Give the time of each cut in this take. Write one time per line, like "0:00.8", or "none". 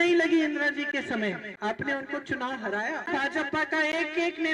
0:01.5
0:03.1